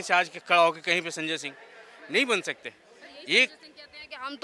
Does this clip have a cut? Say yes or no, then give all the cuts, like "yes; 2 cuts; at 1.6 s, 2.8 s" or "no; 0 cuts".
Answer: no; 0 cuts